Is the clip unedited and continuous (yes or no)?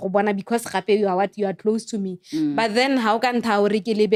yes